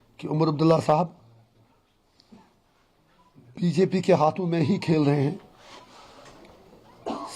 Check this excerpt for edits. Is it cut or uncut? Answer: uncut